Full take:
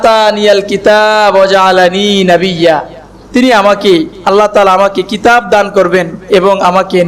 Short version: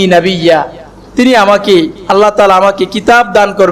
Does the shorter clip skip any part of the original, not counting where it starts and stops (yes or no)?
no